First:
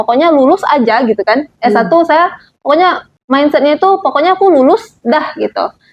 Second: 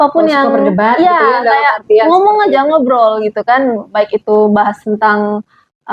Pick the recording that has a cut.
first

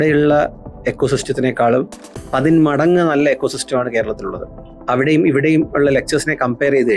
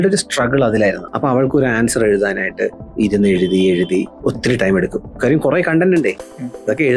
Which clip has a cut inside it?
second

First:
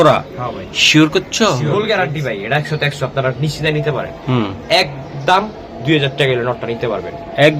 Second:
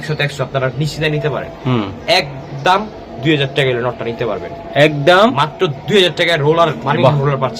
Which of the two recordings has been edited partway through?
first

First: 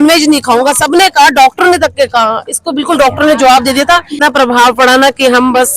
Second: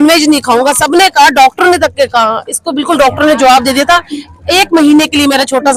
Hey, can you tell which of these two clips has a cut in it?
first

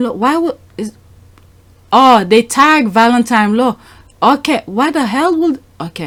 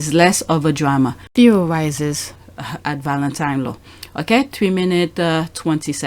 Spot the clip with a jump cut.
second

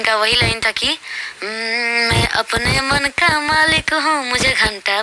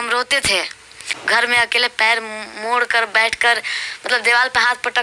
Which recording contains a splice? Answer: second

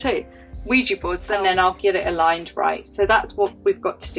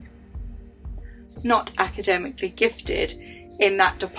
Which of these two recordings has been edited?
first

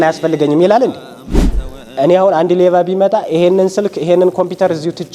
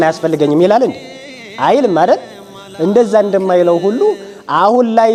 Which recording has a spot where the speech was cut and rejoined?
first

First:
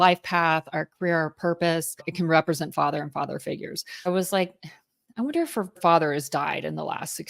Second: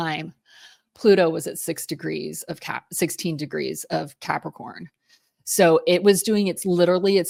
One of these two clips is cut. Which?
first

